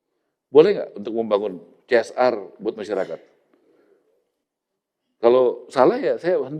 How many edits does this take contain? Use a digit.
0